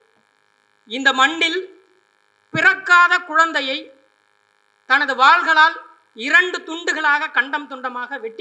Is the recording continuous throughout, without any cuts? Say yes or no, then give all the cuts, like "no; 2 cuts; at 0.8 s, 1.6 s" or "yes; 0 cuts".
yes; 0 cuts